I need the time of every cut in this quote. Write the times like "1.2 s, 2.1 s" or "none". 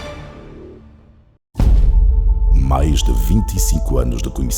1.5 s